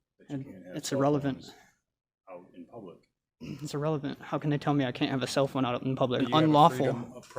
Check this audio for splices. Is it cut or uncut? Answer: cut